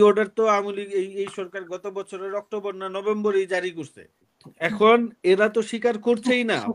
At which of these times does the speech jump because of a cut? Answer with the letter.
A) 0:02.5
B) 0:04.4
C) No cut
B